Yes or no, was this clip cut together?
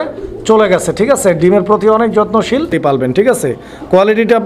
yes